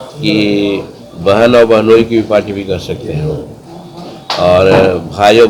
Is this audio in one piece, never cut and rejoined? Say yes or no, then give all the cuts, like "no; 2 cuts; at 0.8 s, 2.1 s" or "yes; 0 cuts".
yes; 0 cuts